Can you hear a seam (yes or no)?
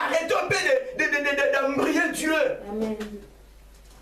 no